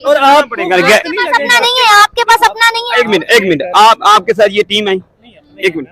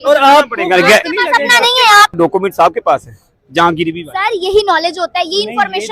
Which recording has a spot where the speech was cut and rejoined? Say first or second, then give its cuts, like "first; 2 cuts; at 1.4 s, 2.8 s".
second; 1 cut; at 2.2 s